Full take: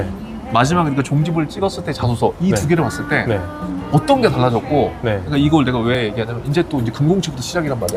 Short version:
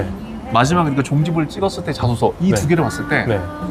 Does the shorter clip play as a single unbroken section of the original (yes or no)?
yes